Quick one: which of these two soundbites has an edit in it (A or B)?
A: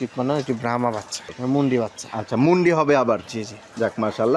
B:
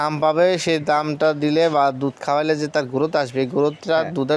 A